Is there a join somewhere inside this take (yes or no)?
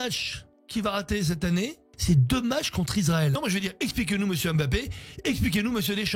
yes